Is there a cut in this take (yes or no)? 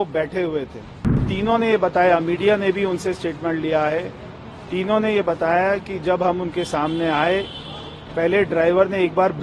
yes